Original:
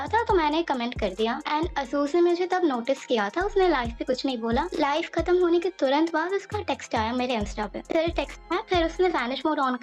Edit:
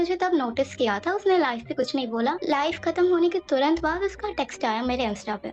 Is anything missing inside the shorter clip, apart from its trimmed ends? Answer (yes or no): no